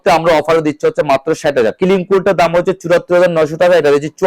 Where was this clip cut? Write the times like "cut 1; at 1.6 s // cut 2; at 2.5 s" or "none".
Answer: cut 1; at 1.7 s